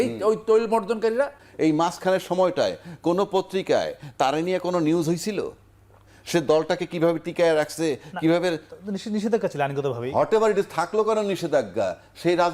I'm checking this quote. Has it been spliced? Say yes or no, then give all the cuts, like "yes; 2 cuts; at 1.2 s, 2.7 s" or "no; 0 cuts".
yes; 1 cut; at 1.4 s